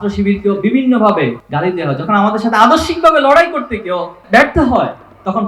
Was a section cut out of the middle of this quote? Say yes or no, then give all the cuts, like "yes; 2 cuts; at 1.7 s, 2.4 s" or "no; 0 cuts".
yes; 2 cuts; at 1.4 s, 4.2 s